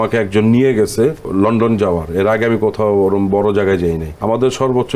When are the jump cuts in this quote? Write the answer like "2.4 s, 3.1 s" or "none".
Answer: 1.2 s, 4.1 s